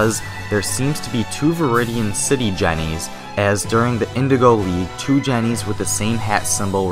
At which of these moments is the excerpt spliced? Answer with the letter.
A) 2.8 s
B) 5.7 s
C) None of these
A